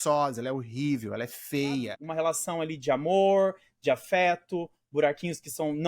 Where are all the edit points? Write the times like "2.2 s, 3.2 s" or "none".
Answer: 2.0 s